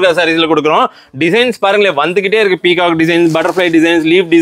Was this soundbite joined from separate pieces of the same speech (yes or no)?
no